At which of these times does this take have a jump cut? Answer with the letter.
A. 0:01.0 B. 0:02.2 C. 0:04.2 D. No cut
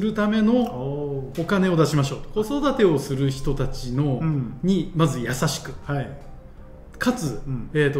B